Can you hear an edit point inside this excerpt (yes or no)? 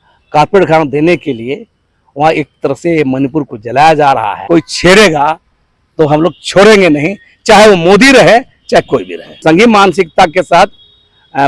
yes